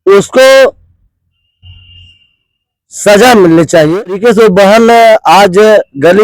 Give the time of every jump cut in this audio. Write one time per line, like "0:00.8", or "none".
0:04.2